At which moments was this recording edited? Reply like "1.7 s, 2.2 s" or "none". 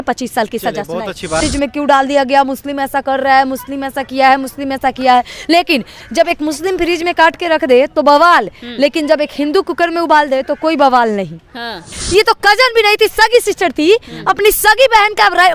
1.4 s, 11.9 s